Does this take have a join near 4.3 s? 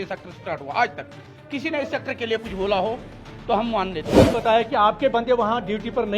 yes; 1 cut; at 4.3 s

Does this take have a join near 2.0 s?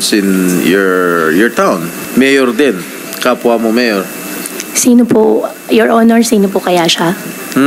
yes; 1 cut; at 2.0 s

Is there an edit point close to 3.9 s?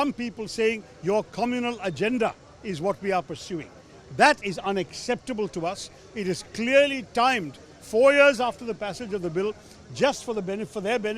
no; 0 cuts

